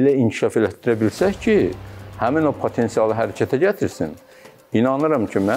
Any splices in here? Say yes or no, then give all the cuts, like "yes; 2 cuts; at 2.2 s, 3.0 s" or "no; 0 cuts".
no; 0 cuts